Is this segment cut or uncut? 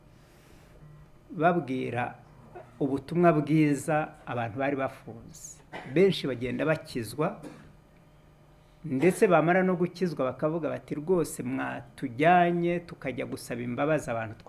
uncut